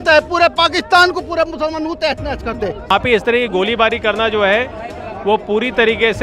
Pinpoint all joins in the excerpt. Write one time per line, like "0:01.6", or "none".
0:02.9